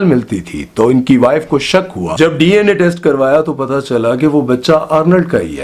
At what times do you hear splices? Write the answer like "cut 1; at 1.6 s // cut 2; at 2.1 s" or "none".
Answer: none

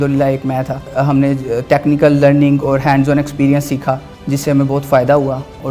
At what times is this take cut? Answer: cut 1; at 0.9 s // cut 2; at 4.1 s

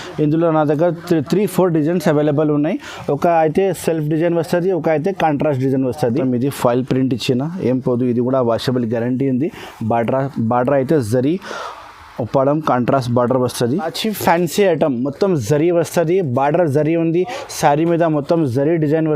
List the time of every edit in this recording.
cut 1; at 6.2 s // cut 2; at 13.9 s

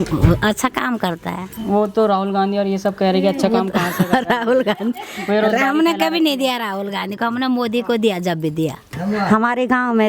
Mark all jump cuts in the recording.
cut 1; at 1.5 s // cut 2; at 8.8 s

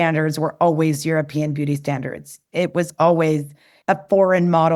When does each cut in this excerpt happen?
none

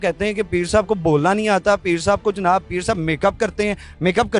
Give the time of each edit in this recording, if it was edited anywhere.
none

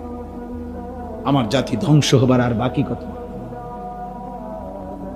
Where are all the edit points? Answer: cut 1; at 1.2 s // cut 2; at 2.9 s

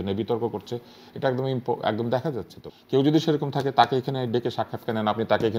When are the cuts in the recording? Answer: cut 1; at 2.6 s

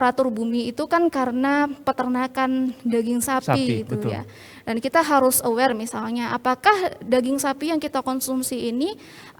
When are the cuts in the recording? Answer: none

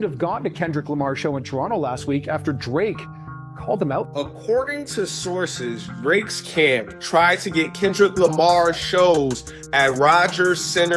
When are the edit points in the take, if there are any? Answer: cut 1; at 4.1 s

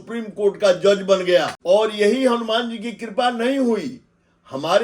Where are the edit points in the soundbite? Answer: cut 1; at 1.5 s

